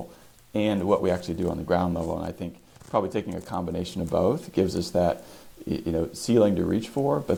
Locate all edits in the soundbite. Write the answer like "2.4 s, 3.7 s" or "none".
none